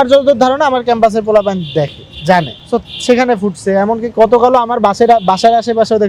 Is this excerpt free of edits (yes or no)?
yes